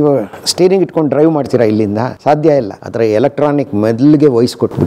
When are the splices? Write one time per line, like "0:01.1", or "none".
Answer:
0:02.1
0:02.8